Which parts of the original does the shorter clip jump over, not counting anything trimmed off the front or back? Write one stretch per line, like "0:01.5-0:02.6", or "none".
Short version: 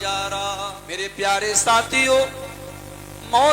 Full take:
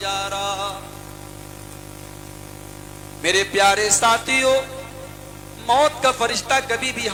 0:01.0-0:03.3